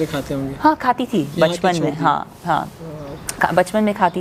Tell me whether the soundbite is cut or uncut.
uncut